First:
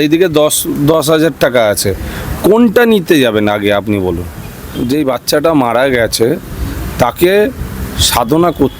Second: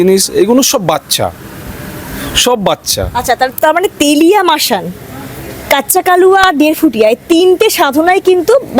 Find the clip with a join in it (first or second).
first